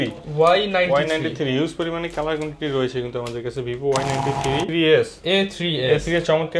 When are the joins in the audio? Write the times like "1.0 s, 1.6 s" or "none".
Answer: 4.7 s